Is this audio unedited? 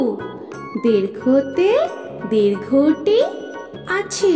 yes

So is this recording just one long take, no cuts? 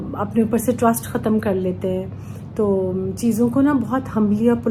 yes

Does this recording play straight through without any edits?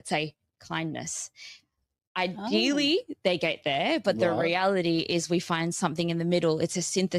yes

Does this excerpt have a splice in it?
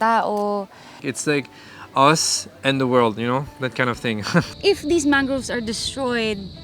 yes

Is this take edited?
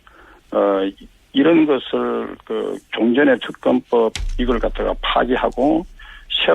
yes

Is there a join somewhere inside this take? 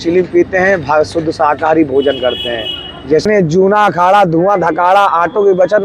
yes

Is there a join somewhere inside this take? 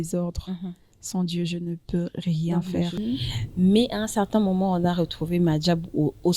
yes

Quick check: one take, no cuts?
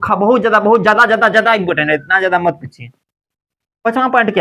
yes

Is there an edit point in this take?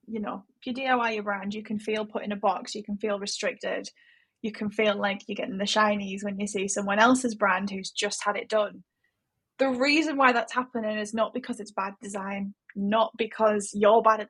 no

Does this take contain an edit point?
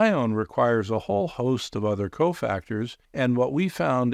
no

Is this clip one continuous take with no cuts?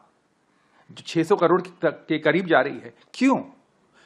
yes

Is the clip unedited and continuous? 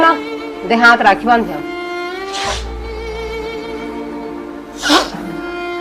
yes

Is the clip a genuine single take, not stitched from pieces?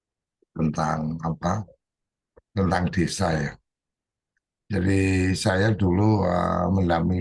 yes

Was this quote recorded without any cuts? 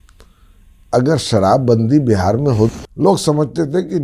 no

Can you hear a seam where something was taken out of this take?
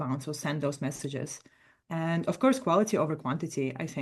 no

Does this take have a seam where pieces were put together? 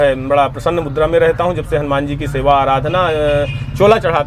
no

